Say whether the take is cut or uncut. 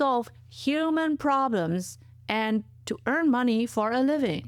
uncut